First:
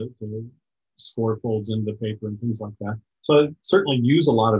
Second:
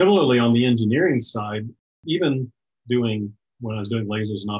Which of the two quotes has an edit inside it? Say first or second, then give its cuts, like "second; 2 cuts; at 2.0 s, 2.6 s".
second; 2 cuts; at 1.9 s, 3.5 s